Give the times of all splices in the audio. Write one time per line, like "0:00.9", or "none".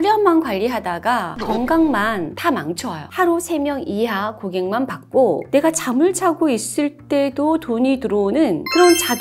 0:03.1